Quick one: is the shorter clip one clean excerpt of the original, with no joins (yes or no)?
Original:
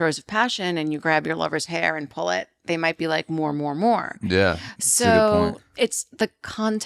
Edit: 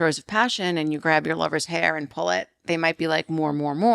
yes